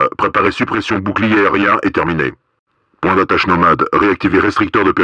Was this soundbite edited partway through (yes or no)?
no